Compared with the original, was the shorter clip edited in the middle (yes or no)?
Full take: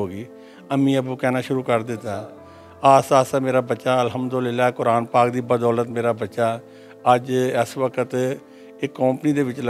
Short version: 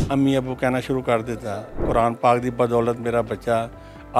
yes